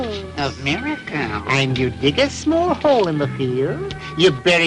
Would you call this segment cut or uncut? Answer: uncut